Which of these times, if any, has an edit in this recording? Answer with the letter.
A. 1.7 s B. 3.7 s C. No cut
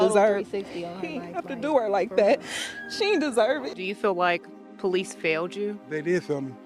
B